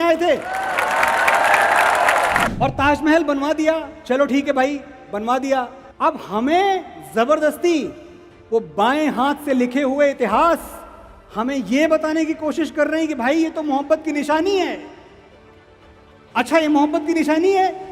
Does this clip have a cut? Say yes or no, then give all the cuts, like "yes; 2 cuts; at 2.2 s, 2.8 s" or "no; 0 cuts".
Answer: yes; 2 cuts; at 2.5 s, 5.8 s